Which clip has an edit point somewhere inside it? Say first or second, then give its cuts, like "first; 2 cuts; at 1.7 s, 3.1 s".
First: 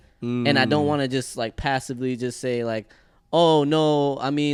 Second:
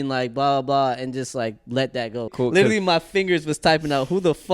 second; 1 cut; at 2.3 s